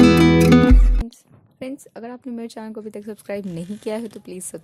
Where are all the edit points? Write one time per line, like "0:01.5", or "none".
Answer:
0:01.0